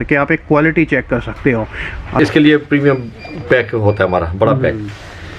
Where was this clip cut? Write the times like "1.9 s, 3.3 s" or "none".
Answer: 2.2 s